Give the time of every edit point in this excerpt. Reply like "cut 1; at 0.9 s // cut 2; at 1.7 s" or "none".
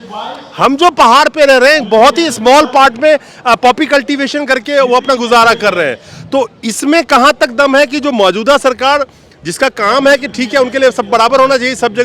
none

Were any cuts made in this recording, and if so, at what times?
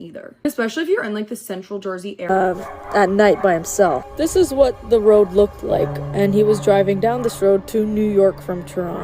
cut 1; at 2.3 s

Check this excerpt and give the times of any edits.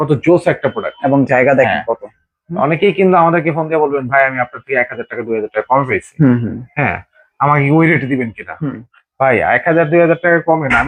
none

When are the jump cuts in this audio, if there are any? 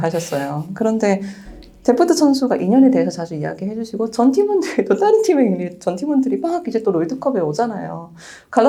none

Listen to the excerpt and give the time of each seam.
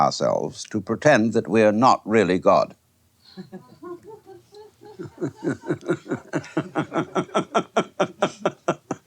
cut 1; at 4.2 s

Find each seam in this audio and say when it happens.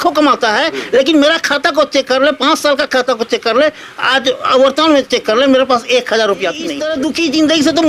cut 1; at 6.8 s

